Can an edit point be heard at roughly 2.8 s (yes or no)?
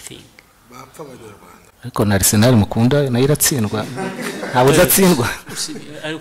no